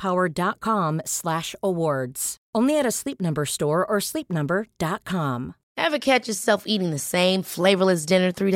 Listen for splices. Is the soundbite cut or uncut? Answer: cut